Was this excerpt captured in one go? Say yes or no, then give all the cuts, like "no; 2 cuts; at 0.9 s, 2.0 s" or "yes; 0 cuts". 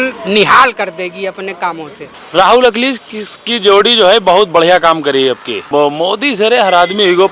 no; 2 cuts; at 2.0 s, 5.7 s